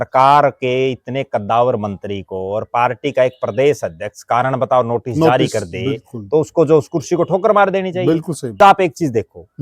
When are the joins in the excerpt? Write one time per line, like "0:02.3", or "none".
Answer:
0:08.6